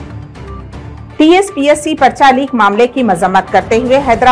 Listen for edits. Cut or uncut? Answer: uncut